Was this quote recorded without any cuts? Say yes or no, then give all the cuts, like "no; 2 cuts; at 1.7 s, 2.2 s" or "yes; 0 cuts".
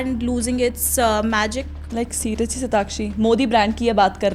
yes; 0 cuts